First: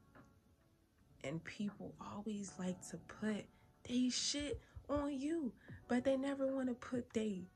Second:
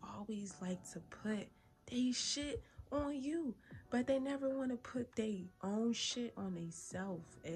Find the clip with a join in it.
first; 1 cut; at 1.0 s

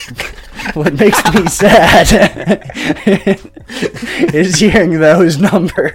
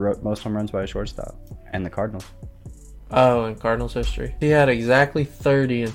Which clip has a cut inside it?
second; 2 cuts; at 1.5 s, 4.3 s

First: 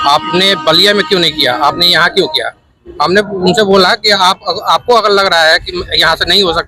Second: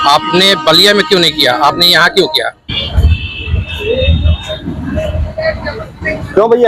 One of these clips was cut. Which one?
second; 1 cut; at 2.9 s

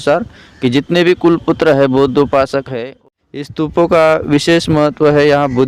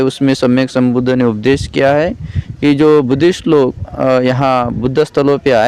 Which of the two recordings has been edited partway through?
first; 1 cut; at 2.8 s

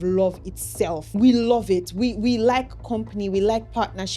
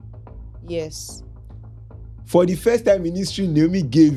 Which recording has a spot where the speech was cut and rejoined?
first; 1 cut; at 1.0 s

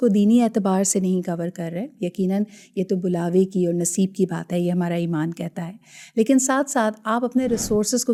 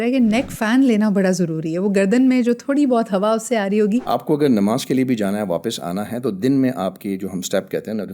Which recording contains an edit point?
second; 1 cut; at 4.0 s

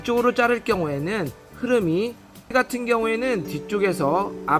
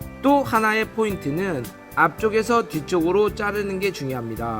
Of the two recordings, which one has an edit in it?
first; 1 cut; at 2.5 s

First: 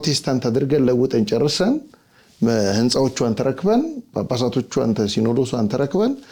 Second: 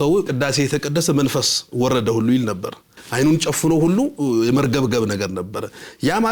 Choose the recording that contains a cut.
second; 1 cut; at 3.0 s

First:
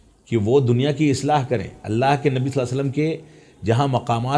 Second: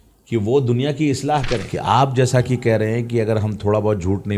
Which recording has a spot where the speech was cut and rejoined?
second; 1 cut; at 1.7 s

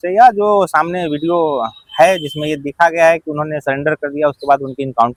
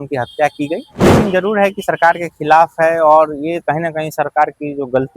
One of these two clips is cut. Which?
second; 1 cut; at 1.0 s

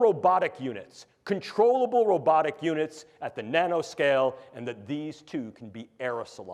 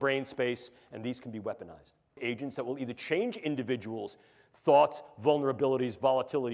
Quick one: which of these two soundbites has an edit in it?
second; 1 cut; at 2.2 s

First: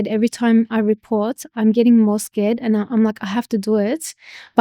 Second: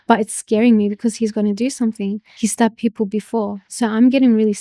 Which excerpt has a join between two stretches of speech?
second; 1 cut; at 2.2 s

